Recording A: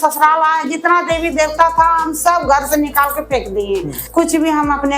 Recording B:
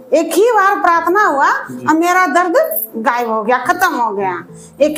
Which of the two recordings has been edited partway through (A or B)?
A